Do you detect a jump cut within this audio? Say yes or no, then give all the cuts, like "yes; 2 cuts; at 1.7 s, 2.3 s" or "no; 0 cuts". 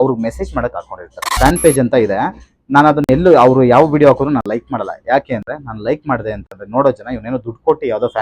yes; 1 cut; at 1.3 s